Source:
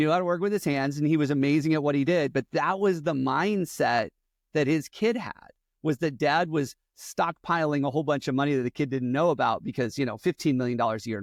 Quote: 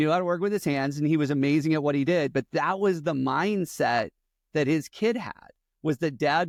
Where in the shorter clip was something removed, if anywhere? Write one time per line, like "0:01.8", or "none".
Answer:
none